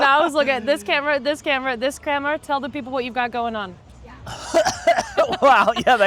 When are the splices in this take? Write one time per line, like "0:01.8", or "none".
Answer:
none